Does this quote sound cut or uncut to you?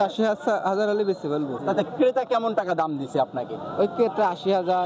cut